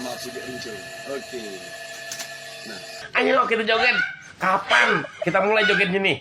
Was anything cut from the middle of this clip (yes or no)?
yes